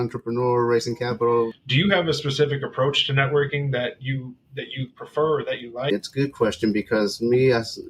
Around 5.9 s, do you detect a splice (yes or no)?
yes